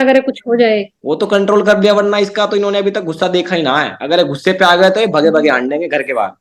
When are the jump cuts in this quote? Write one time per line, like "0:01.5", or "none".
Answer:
0:00.9